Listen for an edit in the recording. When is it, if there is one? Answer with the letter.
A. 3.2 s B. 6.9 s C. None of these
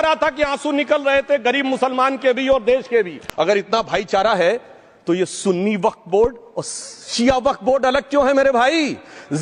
A